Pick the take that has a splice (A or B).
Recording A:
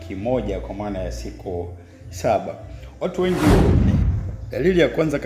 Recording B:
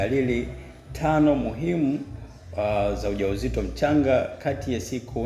A